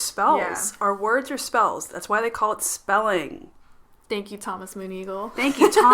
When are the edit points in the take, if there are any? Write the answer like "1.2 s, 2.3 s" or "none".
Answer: none